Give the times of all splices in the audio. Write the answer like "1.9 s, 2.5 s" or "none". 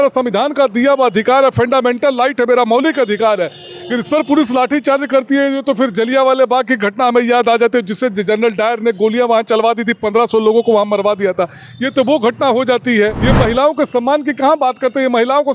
13.2 s